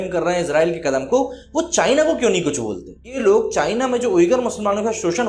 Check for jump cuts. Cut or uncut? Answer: cut